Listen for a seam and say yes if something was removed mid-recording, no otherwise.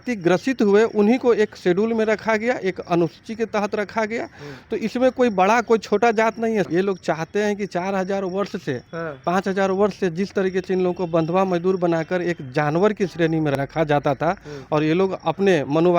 yes